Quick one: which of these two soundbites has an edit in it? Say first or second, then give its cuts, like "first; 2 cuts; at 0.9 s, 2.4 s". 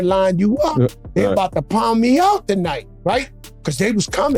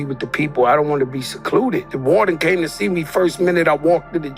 second; 1 cut; at 1.9 s